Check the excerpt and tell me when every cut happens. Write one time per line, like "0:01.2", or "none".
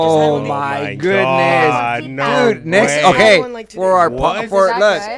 none